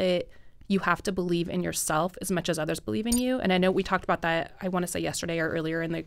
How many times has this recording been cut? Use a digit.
0